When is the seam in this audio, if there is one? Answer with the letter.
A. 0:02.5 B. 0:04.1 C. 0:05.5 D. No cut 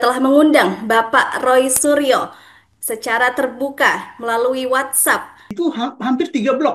C